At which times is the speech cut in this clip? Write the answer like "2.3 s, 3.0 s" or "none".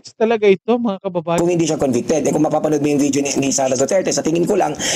1.4 s